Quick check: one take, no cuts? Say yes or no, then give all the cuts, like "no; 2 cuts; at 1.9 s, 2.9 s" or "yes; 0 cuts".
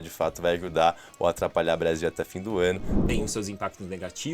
no; 1 cut; at 2.9 s